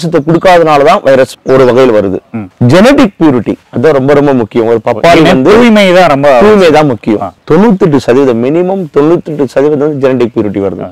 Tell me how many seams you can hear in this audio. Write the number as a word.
two